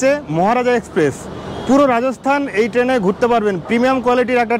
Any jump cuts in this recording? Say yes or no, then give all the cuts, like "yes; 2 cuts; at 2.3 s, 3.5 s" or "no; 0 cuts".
no; 0 cuts